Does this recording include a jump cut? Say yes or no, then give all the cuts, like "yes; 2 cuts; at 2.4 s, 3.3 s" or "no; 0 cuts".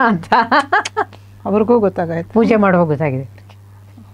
no; 0 cuts